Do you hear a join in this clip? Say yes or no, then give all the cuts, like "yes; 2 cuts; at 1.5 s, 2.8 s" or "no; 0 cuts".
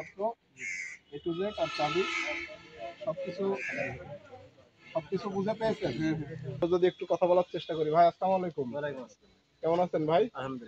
yes; 1 cut; at 6.6 s